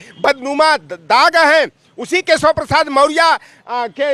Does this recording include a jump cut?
no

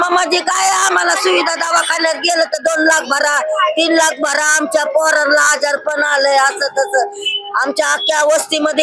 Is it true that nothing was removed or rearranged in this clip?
yes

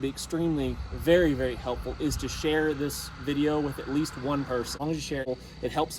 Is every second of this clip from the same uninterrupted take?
no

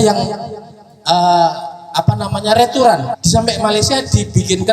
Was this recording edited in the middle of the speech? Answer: yes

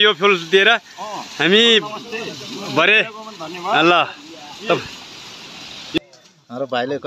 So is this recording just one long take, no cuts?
no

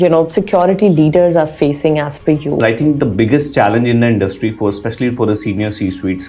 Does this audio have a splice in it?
yes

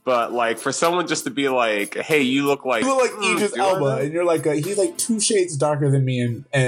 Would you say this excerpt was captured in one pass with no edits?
no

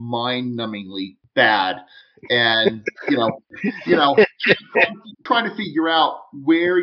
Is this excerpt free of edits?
no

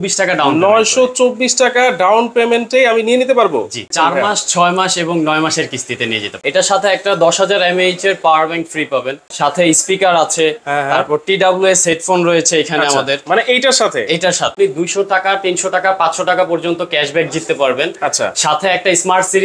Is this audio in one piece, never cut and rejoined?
no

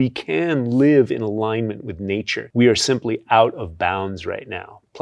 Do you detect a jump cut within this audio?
yes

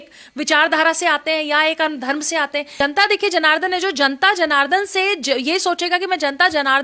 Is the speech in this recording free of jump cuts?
no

